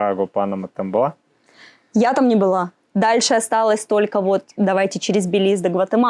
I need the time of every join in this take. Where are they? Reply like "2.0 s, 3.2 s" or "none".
2.8 s

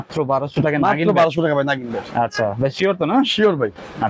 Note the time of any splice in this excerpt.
none

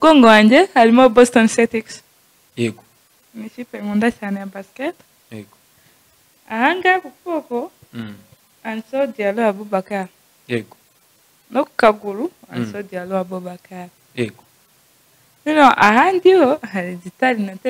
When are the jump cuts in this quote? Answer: none

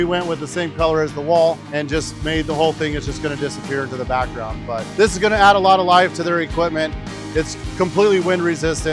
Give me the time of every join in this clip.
none

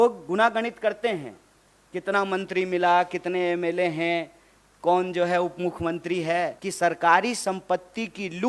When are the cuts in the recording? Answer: 6.6 s

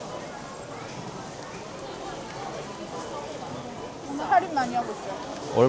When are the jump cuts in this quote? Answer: none

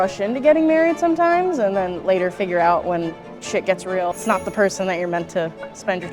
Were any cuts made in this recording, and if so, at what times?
4.1 s

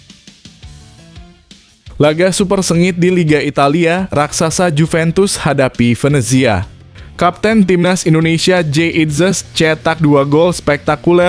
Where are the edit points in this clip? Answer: 2.0 s

